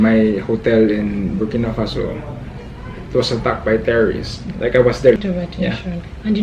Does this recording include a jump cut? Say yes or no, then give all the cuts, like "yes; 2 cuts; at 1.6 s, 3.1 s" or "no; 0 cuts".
yes; 1 cut; at 5.2 s